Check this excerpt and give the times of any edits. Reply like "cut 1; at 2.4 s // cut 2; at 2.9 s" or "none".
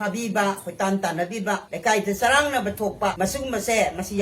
cut 1; at 1.7 s // cut 2; at 3.1 s